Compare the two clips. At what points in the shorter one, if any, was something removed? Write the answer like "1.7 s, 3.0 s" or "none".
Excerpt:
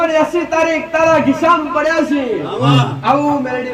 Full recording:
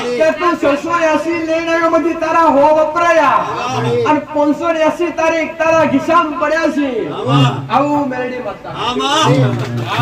none